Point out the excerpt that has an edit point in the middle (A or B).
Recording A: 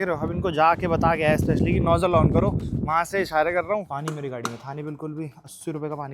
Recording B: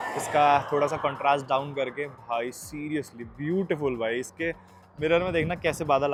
A